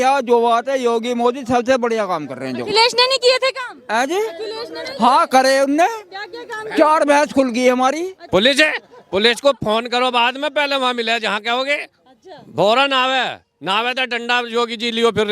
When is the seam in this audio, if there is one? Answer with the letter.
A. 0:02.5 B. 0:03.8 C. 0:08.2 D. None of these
C